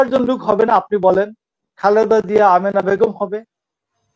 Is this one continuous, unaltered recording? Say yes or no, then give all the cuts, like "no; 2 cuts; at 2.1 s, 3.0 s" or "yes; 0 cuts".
no; 1 cut; at 1.6 s